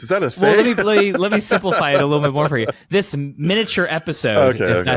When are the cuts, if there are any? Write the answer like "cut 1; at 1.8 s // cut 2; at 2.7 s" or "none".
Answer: none